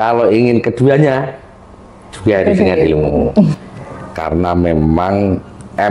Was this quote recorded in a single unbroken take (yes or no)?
no